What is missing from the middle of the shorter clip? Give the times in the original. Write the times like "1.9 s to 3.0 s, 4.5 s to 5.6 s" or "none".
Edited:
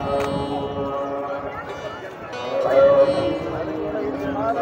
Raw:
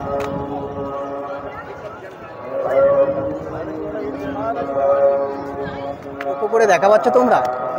none